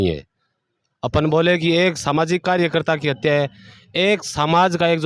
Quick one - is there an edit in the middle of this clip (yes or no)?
no